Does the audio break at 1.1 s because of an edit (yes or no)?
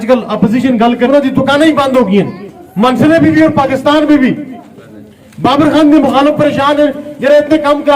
yes